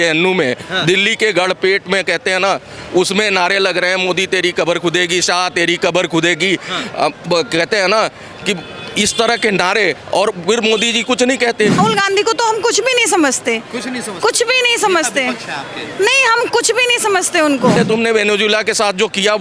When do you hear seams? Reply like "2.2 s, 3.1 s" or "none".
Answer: 11.8 s, 17.8 s

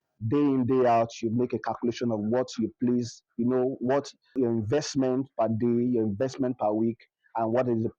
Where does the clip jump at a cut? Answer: 4.3 s

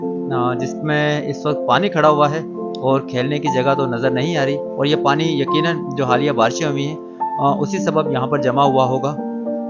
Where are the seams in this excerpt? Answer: none

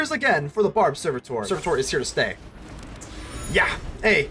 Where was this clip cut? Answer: 1.5 s

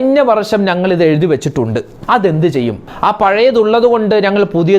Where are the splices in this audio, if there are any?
1.9 s, 2.8 s

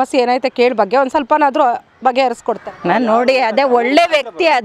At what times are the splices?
2.6 s

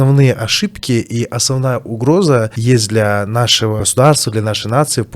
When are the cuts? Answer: 2.5 s, 3.8 s

